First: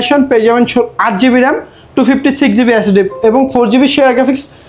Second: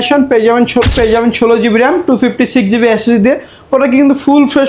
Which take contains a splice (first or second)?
second